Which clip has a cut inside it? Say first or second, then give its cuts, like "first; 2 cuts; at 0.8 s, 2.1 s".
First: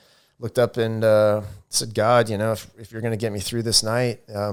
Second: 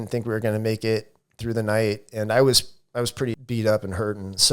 second; 1 cut; at 3.4 s